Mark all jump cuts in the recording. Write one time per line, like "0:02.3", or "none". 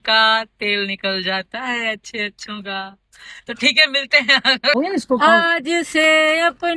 0:04.8